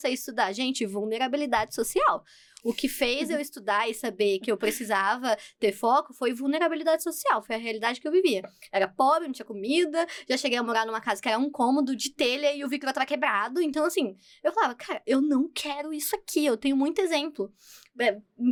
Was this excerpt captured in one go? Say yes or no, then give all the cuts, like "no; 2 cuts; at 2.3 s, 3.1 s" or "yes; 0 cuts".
yes; 0 cuts